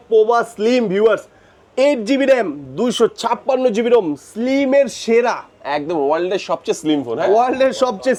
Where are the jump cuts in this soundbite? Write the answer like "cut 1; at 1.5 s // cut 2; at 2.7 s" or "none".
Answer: none